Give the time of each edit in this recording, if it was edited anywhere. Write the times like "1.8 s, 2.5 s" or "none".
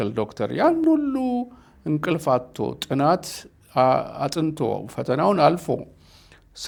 none